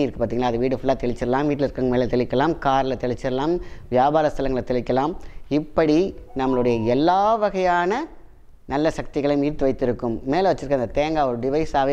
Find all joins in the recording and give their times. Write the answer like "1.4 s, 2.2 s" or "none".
none